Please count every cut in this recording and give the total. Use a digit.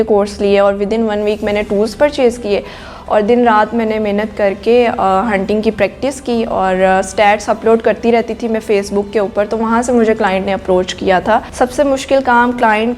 1